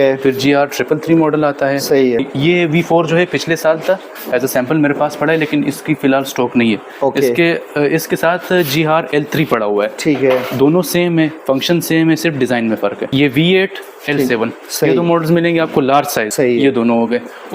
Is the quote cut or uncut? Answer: cut